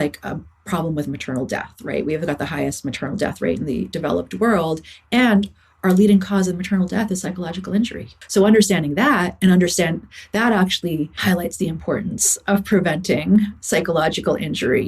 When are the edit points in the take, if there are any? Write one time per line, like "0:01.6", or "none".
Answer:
0:08.2
0:11.1